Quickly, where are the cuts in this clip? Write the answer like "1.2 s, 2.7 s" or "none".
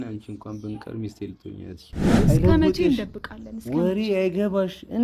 2.1 s